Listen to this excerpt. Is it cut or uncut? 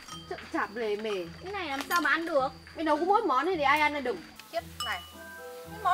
cut